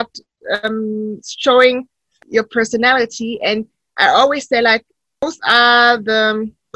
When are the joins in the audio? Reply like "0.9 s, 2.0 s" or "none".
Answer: 2.2 s, 5.2 s